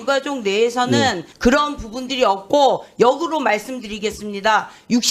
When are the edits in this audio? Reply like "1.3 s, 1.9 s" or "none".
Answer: 1.3 s

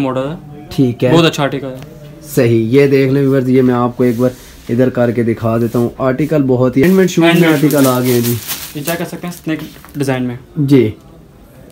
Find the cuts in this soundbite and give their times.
6.8 s

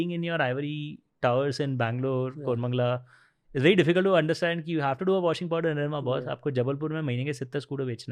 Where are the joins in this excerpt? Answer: none

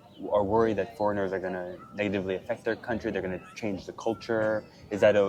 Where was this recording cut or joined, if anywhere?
none

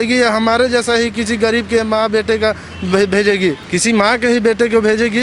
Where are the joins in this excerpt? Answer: 3.6 s

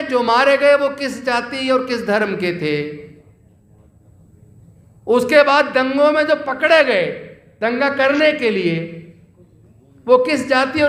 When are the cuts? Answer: none

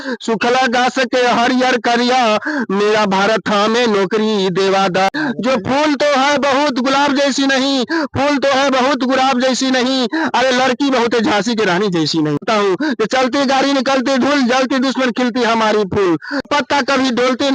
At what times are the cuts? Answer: 5.1 s, 12.4 s, 16.5 s

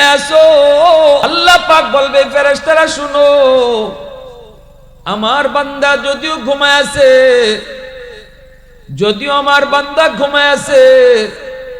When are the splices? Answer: 1.3 s

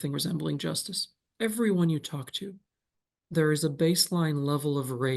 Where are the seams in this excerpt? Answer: 1.2 s

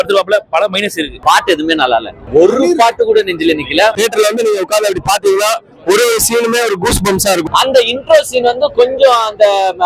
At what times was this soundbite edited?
1.1 s, 2.2 s, 4.0 s, 7.5 s

